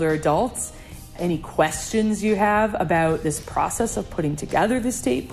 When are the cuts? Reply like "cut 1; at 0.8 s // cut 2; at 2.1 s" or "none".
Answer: cut 1; at 1.2 s

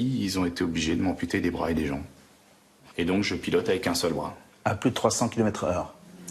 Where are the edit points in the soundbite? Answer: cut 1; at 2.8 s

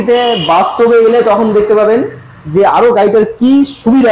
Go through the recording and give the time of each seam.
none

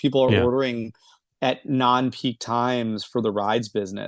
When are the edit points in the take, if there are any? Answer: none

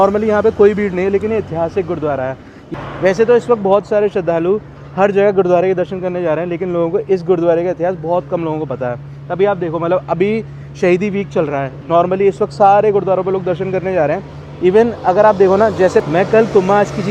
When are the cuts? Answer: cut 1; at 2.6 s

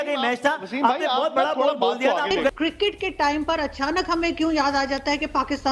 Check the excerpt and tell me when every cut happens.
cut 1; at 2.5 s

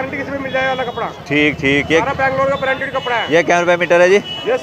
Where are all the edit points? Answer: none

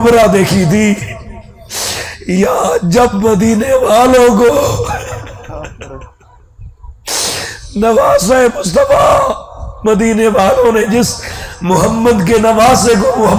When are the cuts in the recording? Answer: none

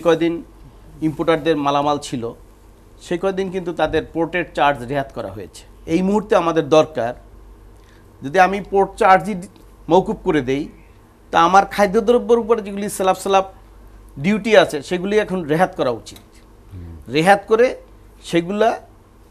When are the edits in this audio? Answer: cut 1; at 5.8 s

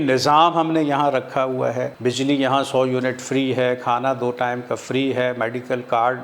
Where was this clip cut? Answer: cut 1; at 1.9 s

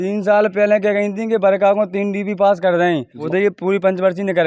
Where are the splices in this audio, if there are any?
cut 1; at 3.2 s

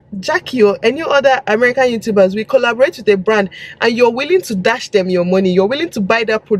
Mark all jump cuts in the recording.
none

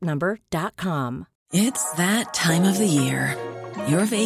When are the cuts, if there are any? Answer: cut 1; at 1.3 s

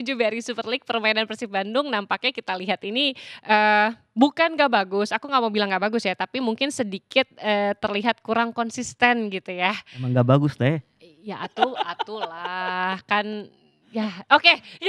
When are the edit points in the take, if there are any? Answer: none

